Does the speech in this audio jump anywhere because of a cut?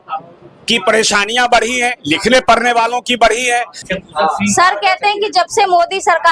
no; 0 cuts

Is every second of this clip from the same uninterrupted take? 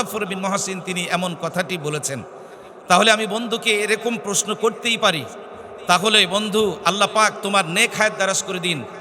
yes; 0 cuts

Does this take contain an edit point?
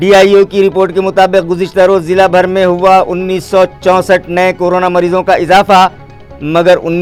no; 0 cuts

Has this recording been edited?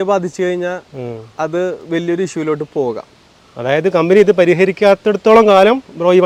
no; 0 cuts

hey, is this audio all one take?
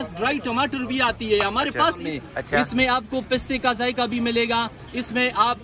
no; 1 cut; at 2.1 s

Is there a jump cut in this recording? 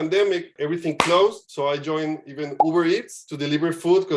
yes; 1 cut; at 1.5 s

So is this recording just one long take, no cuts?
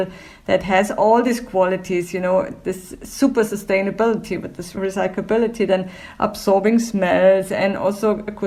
yes; 0 cuts

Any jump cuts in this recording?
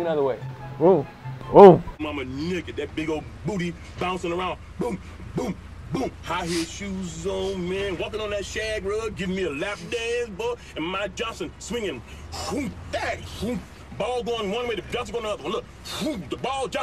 yes; 1 cut; at 1.9 s

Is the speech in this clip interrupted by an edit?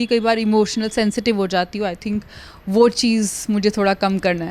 no; 0 cuts

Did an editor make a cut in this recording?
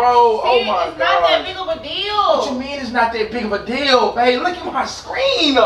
no; 0 cuts

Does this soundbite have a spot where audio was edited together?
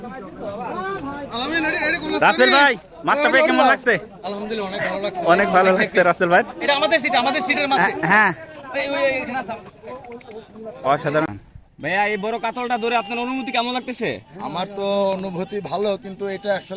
yes; 1 cut; at 11.3 s

